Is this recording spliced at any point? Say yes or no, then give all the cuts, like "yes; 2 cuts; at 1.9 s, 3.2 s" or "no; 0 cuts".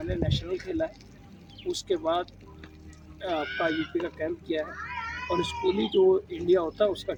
no; 0 cuts